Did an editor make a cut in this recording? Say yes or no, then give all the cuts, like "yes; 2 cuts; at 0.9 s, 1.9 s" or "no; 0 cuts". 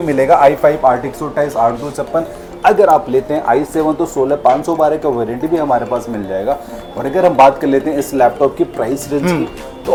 no; 0 cuts